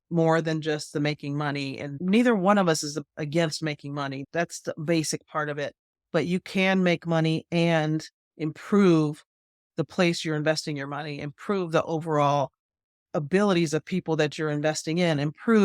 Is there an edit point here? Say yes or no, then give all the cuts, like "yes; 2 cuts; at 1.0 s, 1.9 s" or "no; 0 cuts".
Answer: yes; 2 cuts; at 2.0 s, 4.2 s